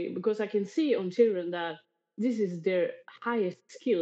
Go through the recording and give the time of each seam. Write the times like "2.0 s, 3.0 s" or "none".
none